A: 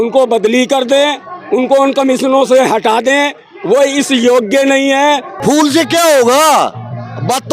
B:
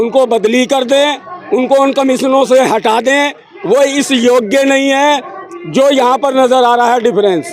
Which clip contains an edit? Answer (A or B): A